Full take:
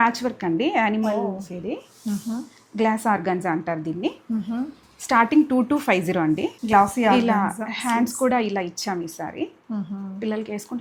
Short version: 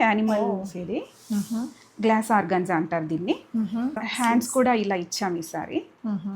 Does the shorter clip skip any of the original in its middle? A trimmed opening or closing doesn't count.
yes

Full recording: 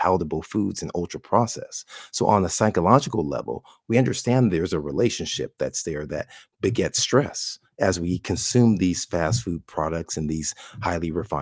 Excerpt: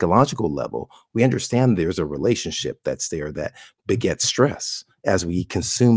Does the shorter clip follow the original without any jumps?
yes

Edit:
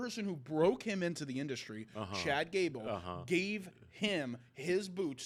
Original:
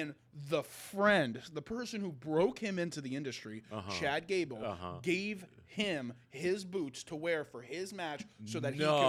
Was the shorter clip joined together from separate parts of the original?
no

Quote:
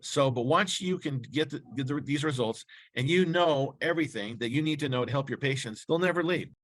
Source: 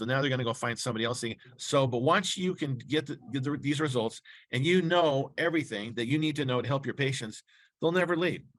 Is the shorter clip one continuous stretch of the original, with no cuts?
no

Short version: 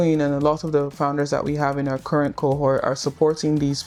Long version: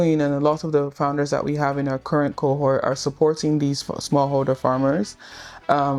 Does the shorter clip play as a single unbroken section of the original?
yes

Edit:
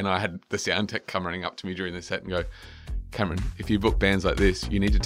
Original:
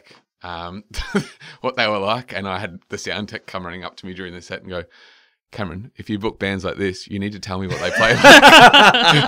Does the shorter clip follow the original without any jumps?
yes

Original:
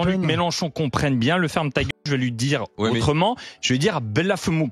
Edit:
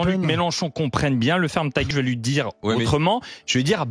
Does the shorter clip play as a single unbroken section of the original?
no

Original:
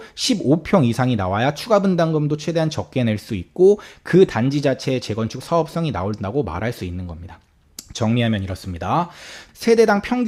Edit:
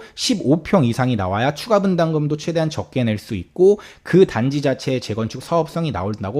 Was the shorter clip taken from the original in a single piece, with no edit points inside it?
yes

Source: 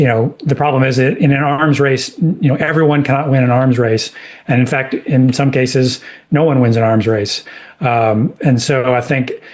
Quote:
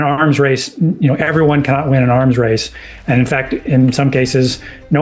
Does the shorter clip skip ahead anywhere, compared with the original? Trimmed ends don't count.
no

